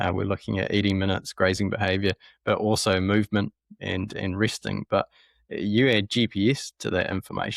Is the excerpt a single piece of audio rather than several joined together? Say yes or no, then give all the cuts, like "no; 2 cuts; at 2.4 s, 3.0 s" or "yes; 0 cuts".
yes; 0 cuts